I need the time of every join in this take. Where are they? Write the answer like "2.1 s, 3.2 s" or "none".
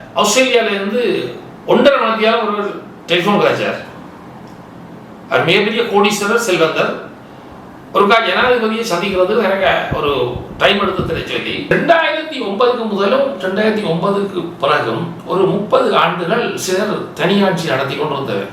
11.7 s